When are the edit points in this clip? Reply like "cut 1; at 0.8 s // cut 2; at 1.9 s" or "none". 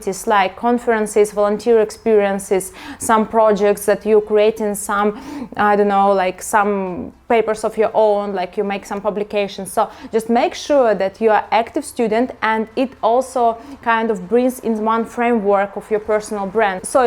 none